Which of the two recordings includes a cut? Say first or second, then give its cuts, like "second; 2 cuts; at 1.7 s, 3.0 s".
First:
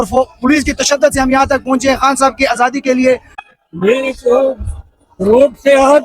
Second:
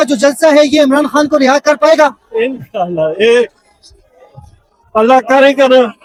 first; 1 cut; at 3.4 s